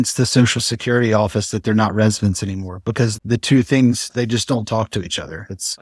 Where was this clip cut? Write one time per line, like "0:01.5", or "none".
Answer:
none